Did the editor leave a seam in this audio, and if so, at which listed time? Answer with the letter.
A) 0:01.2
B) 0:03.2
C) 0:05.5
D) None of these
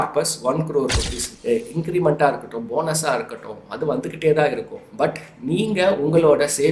A